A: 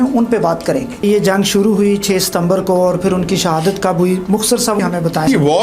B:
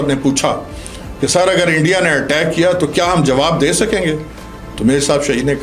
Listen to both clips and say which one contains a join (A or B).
A